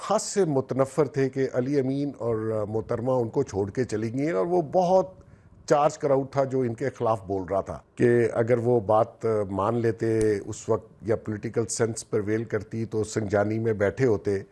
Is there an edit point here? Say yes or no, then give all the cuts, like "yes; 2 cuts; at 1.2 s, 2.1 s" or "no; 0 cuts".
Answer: yes; 1 cut; at 7.8 s